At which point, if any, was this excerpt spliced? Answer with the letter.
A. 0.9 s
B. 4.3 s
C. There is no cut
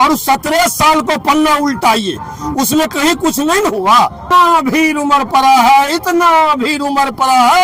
B